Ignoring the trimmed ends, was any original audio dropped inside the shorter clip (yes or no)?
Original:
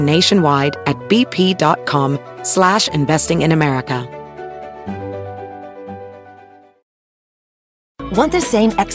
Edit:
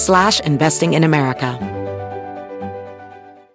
yes